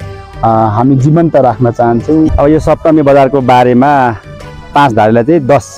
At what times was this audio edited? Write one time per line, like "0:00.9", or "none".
0:02.3
0:04.7